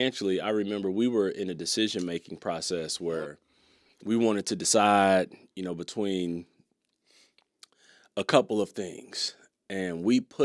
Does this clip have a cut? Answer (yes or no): no